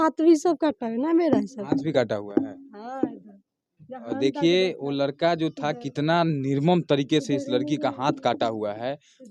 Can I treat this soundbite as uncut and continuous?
yes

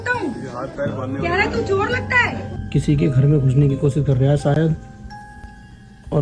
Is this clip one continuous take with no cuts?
no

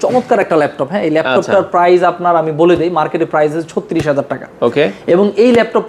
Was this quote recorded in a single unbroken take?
yes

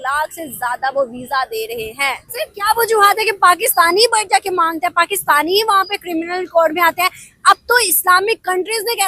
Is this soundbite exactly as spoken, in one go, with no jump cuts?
no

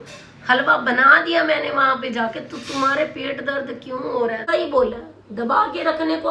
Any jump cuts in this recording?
yes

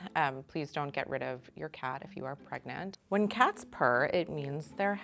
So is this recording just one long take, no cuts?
no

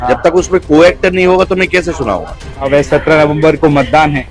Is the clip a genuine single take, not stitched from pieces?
no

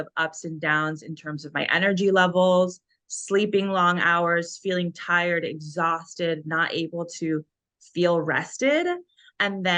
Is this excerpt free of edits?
yes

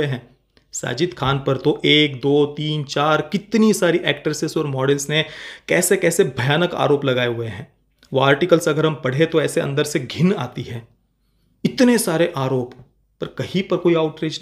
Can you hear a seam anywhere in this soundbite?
no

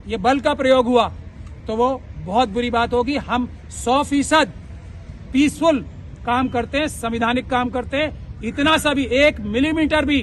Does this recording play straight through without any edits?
yes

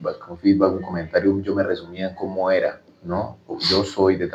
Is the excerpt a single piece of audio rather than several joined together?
yes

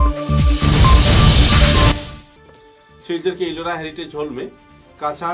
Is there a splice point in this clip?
no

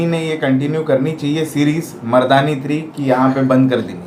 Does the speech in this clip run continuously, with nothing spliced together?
yes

